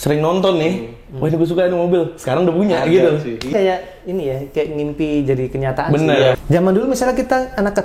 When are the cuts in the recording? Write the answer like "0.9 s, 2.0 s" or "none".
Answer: 3.5 s, 6.4 s